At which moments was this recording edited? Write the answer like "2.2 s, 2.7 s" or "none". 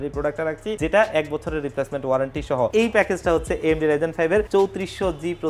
0.8 s, 2.7 s, 4.5 s